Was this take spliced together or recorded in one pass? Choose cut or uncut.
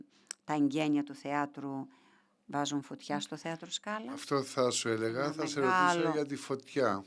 uncut